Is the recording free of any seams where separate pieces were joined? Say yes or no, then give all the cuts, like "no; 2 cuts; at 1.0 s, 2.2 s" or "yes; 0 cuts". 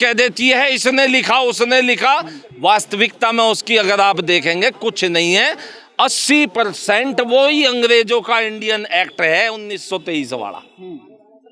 yes; 0 cuts